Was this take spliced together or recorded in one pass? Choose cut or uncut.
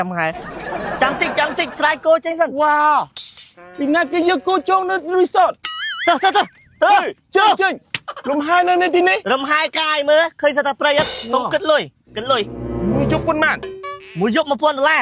cut